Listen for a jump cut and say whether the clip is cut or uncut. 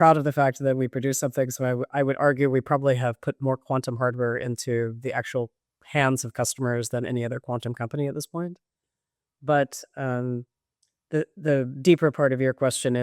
uncut